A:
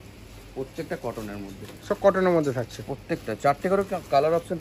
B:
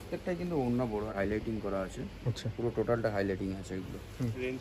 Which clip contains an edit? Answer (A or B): B